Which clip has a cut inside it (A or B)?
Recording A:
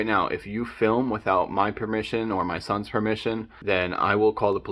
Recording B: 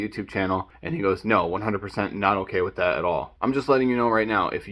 B